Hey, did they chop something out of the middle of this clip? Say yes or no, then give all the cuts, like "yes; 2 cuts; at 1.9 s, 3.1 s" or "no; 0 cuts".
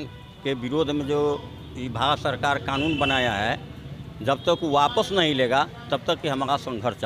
no; 0 cuts